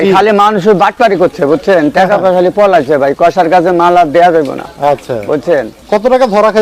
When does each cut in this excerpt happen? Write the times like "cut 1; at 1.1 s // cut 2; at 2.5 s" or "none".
none